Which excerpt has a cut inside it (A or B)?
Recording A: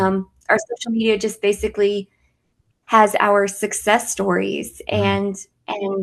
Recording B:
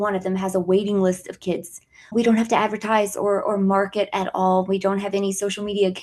B